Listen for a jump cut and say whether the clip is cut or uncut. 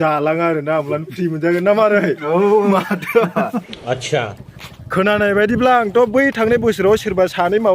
cut